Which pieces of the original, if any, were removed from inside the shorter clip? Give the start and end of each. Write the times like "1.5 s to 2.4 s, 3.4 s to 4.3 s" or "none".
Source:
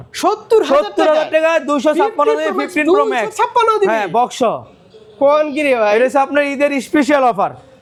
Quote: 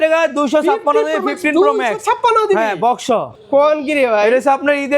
4.7 s to 5.0 s